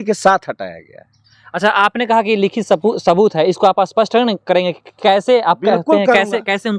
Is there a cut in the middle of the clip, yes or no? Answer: no